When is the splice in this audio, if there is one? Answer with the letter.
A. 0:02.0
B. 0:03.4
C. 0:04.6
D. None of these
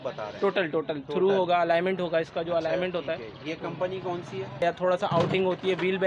C